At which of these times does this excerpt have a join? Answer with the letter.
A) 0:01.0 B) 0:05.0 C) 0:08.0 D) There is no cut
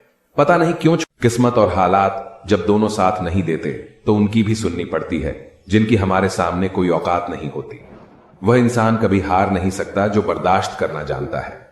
A